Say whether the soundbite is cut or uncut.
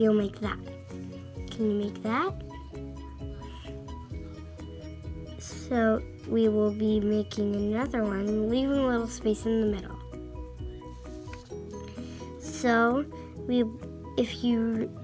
cut